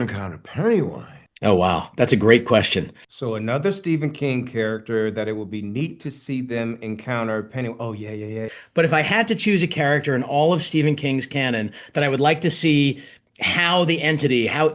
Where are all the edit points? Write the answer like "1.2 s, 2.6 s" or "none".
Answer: 8.6 s